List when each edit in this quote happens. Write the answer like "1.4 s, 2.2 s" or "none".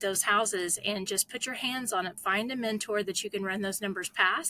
2.2 s